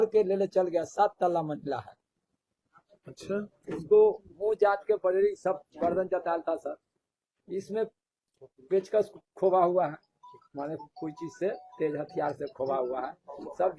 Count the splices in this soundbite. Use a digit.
0